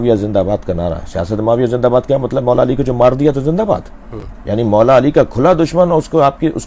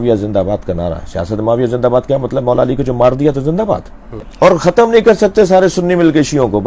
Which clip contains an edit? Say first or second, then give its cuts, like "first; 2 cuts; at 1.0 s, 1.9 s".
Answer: second; 1 cut; at 4.2 s